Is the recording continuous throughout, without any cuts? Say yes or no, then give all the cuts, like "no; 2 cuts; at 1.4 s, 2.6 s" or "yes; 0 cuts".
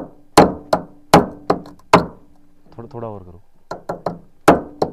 yes; 0 cuts